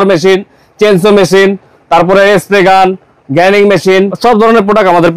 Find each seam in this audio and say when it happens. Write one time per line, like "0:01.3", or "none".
0:04.1